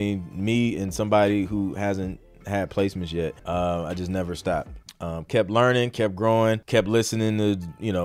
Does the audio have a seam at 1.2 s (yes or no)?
no